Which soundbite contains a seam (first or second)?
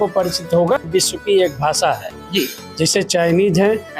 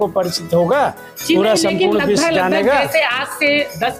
first